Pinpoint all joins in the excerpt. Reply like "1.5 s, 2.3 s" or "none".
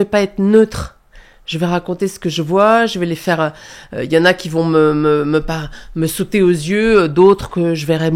none